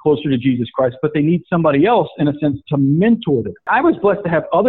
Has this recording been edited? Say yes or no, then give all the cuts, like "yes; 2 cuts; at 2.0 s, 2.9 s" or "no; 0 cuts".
yes; 1 cut; at 3.7 s